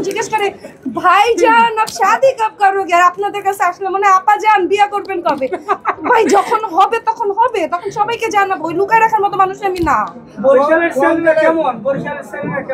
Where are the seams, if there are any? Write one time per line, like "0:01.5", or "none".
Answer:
none